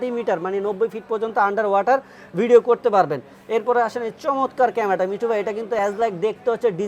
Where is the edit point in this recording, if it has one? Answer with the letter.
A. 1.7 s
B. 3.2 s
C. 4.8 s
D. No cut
D